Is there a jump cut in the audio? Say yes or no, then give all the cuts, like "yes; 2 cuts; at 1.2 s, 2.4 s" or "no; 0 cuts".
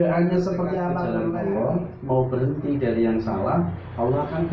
yes; 1 cut; at 1.0 s